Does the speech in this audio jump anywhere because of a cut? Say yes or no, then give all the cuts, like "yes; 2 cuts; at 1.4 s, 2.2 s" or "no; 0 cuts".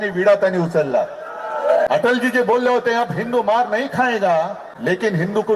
yes; 2 cuts; at 1.9 s, 4.6 s